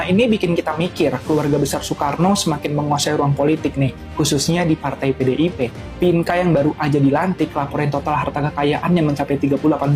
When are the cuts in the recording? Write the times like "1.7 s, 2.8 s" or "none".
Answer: none